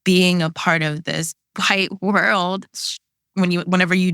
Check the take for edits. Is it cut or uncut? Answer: cut